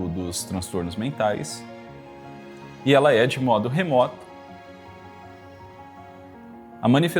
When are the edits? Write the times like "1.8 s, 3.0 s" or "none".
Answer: none